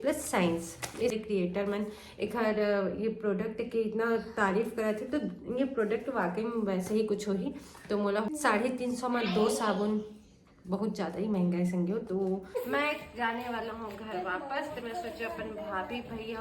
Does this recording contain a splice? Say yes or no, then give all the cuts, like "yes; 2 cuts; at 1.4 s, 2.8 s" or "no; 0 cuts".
yes; 3 cuts; at 1.1 s, 8.3 s, 12.6 s